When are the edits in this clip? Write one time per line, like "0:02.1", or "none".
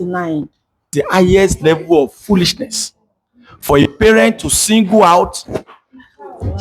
0:00.9